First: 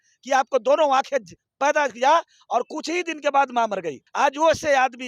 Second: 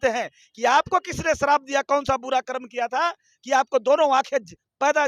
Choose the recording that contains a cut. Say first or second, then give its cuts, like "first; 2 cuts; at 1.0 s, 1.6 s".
first; 1 cut; at 4.0 s